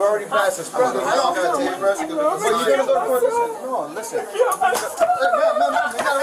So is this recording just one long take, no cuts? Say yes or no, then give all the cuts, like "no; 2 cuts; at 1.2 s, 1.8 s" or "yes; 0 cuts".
yes; 0 cuts